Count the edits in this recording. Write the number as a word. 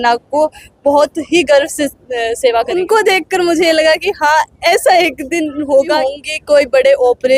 two